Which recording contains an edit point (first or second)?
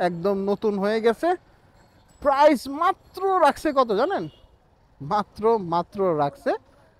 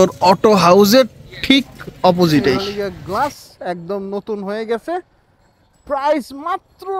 second